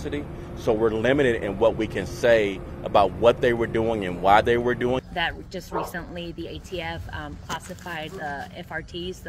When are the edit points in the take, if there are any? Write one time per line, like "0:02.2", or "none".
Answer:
0:05.0